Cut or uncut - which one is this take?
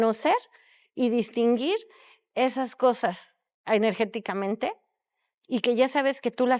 uncut